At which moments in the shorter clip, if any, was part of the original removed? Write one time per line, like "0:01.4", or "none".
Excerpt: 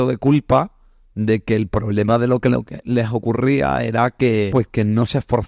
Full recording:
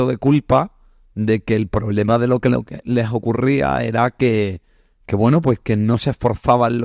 0:04.5